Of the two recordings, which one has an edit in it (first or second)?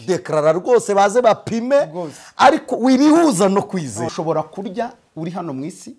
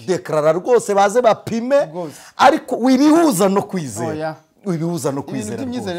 first